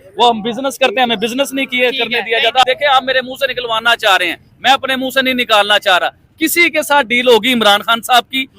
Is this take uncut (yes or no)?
no